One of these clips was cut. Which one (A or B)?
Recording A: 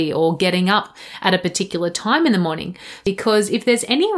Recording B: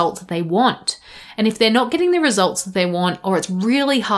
A